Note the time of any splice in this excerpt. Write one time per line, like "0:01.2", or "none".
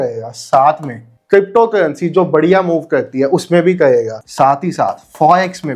0:01.1
0:04.2